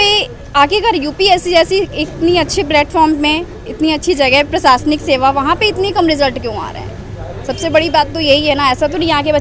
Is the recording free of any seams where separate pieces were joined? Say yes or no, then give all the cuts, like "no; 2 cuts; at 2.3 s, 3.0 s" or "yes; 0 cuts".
yes; 0 cuts